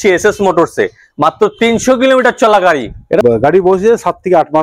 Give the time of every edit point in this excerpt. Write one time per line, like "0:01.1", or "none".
0:03.2